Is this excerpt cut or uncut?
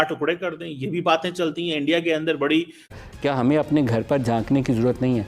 cut